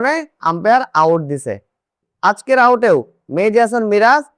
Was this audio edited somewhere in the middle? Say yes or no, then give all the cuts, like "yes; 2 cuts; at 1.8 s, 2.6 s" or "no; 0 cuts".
yes; 1 cut; at 2.1 s